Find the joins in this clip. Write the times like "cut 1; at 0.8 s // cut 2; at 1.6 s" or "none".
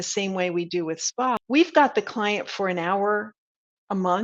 cut 1; at 1.4 s